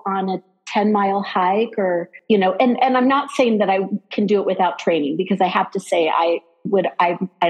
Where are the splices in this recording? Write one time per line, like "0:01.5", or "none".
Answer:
0:02.1

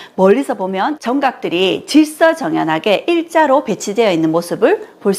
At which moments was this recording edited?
0:00.9

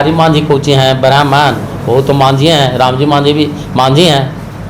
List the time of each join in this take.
none

